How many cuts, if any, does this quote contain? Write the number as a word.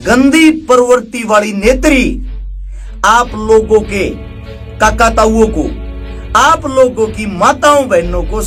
zero